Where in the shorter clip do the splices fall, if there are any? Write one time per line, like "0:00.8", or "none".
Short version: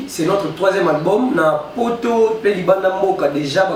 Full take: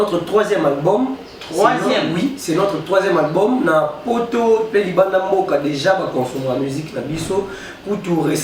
none